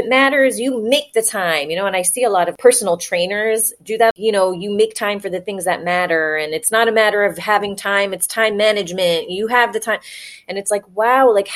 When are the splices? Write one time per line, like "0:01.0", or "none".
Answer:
0:02.5
0:04.1